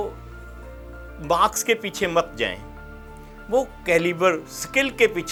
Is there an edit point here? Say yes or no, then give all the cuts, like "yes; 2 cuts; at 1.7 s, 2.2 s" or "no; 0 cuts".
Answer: no; 0 cuts